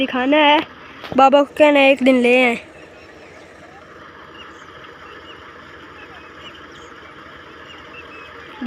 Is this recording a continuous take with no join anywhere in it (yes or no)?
yes